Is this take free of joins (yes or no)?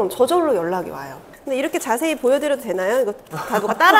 no